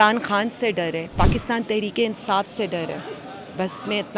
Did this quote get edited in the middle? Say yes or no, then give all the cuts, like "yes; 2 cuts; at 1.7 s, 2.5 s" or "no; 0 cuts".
yes; 1 cut; at 1.1 s